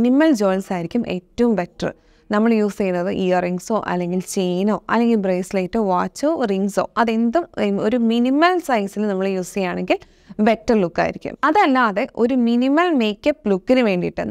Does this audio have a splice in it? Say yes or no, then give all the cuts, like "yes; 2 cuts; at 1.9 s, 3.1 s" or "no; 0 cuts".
yes; 1 cut; at 11.3 s